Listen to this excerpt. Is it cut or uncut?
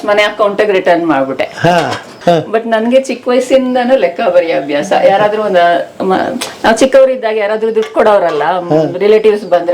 cut